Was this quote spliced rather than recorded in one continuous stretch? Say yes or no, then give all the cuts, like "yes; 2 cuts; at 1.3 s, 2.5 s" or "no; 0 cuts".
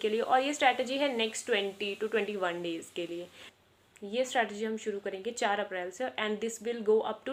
no; 0 cuts